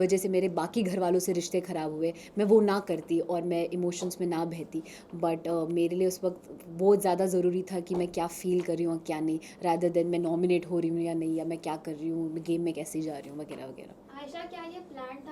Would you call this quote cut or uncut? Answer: uncut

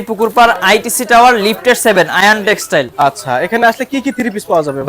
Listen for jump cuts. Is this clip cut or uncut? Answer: uncut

